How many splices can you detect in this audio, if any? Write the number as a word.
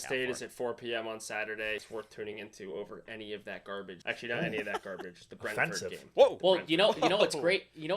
two